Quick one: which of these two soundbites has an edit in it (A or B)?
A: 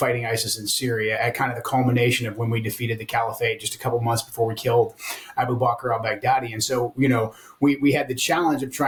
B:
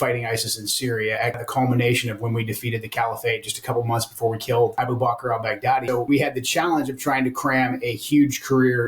B